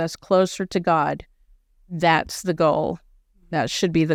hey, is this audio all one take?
yes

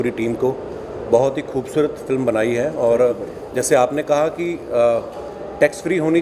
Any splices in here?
no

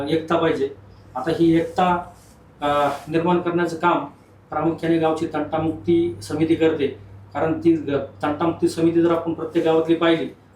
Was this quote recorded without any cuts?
yes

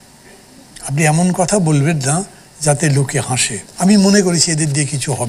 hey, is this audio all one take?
no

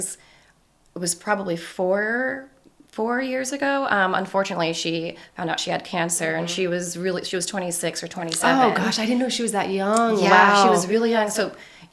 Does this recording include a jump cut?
no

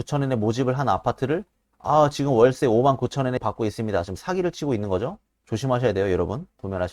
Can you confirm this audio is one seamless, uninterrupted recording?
no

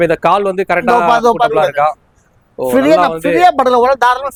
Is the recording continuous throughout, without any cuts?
yes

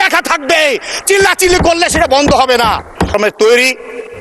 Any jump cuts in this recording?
yes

